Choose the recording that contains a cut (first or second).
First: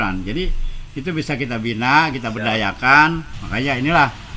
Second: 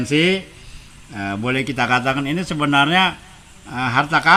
first